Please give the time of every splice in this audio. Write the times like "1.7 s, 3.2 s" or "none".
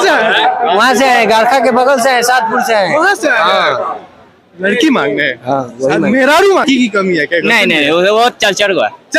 6.6 s